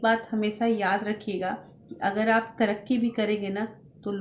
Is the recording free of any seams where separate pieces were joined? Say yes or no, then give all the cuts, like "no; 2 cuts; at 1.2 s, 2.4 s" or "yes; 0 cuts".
yes; 0 cuts